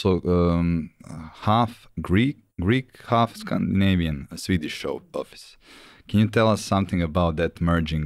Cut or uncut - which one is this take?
uncut